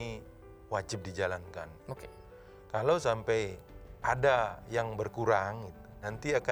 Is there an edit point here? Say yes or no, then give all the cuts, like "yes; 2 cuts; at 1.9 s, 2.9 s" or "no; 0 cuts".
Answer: no; 0 cuts